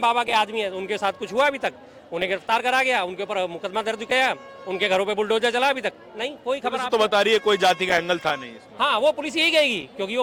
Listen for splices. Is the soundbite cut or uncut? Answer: uncut